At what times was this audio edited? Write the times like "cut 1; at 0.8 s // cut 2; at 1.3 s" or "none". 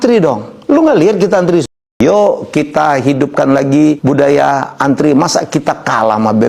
cut 1; at 2.0 s